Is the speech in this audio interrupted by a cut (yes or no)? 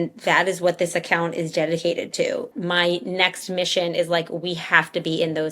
yes